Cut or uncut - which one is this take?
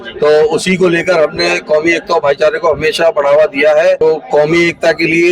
cut